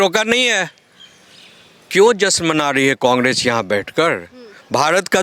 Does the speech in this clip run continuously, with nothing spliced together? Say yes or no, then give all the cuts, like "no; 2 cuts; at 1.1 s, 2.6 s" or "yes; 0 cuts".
yes; 0 cuts